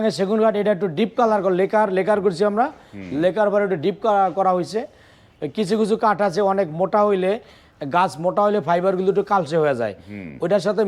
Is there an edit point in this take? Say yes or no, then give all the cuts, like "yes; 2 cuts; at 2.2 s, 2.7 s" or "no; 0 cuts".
no; 0 cuts